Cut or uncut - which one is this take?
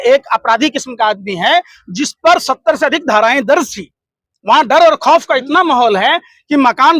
uncut